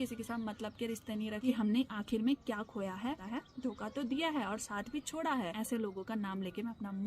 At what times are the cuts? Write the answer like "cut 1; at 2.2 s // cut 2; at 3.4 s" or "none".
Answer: cut 1; at 1.4 s // cut 2; at 3.2 s // cut 3; at 5.5 s